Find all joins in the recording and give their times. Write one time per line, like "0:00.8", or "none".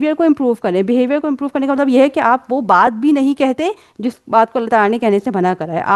none